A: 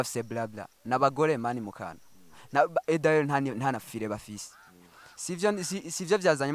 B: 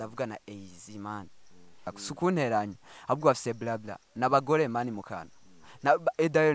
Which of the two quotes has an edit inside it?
B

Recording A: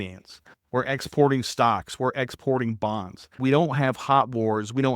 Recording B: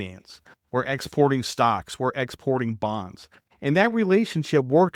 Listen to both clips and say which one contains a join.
A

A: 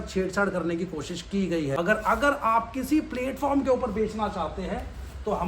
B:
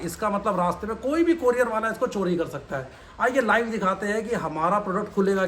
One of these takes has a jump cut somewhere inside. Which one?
A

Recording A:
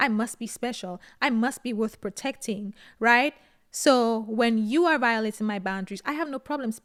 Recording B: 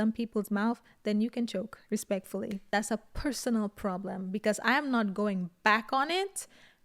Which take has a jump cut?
B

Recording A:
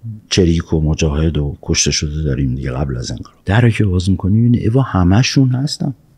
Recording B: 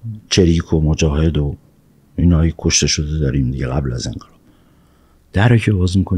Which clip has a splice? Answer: A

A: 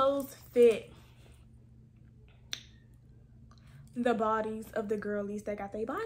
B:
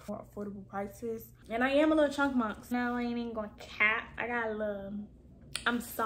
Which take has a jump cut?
B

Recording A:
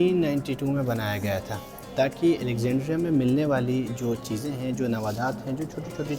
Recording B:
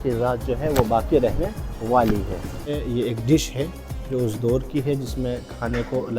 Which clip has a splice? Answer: B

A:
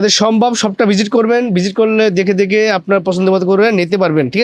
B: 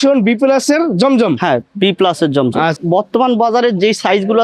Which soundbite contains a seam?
B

